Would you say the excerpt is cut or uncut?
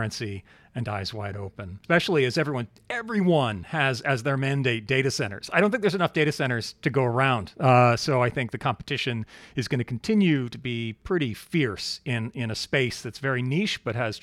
cut